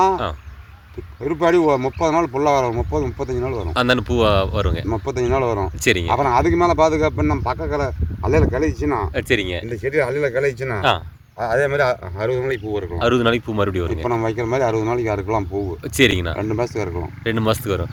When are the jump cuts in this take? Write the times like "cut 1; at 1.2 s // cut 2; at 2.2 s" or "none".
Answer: none